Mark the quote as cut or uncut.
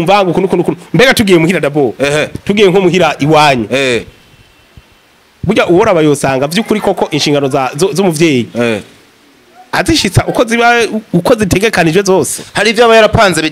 uncut